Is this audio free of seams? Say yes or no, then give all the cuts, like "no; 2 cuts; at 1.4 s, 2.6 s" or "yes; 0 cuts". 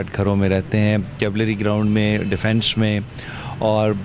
yes; 0 cuts